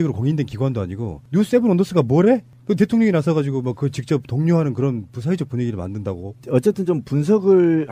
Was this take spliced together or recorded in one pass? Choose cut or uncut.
cut